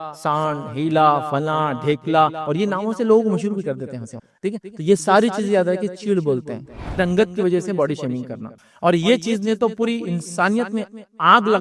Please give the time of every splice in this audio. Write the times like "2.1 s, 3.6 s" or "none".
7.0 s

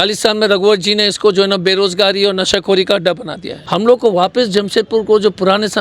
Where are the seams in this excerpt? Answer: none

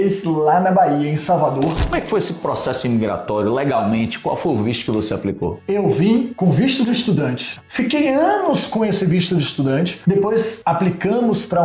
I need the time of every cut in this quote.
1.9 s, 5.5 s, 7.6 s

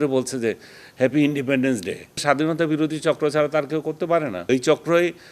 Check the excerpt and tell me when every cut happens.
2.2 s, 4.4 s

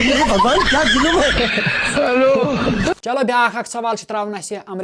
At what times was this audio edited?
none

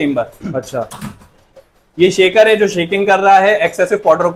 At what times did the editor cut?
none

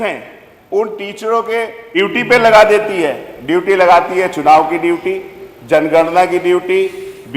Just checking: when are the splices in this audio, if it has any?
1.8 s

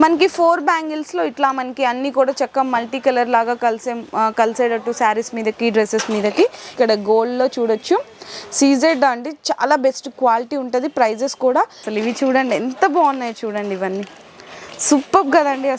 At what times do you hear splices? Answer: 6.7 s, 11.8 s

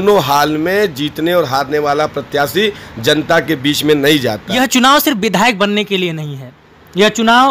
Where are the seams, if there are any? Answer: 4.5 s

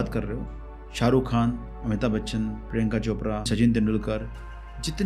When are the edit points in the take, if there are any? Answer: 3.5 s

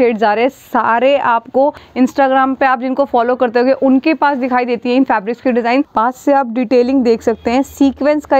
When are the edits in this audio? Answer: 1.8 s, 5.9 s

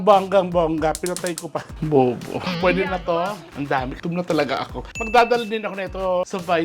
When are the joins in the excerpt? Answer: 2.5 s

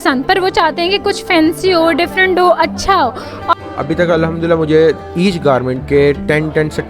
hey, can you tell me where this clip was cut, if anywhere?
3.5 s

